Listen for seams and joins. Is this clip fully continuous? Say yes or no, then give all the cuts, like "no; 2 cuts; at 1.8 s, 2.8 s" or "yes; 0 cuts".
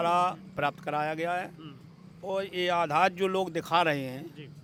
yes; 0 cuts